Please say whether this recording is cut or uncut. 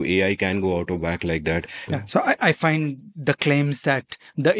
cut